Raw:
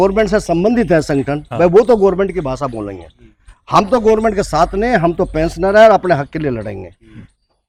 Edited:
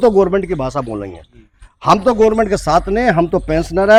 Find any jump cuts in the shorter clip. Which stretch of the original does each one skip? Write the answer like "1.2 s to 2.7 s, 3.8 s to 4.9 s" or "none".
none